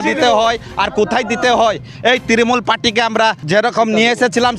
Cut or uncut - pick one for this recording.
cut